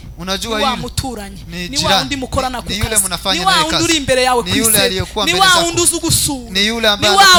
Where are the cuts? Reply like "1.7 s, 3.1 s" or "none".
none